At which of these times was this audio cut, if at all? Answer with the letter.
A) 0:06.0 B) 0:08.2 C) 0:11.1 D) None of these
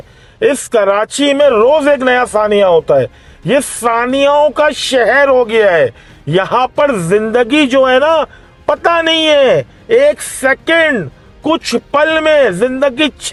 D